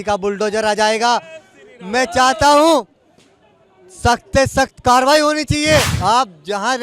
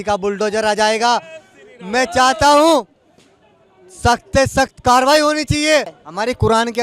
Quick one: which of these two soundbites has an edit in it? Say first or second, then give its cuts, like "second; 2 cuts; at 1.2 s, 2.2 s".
first; 1 cut; at 5.9 s